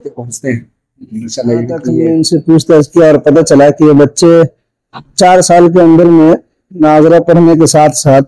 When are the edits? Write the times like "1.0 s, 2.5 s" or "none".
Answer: 2.0 s